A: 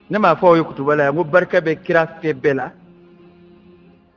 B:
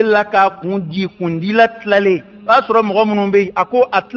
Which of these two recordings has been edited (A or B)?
A